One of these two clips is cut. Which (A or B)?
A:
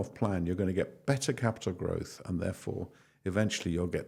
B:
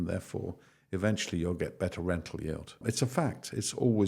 B